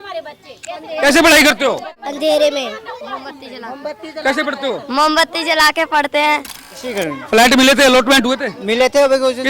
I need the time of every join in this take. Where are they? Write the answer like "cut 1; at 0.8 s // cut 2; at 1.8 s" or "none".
cut 1; at 7.1 s